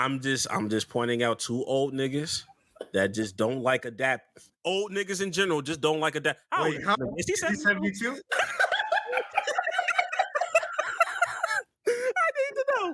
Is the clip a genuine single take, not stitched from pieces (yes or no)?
yes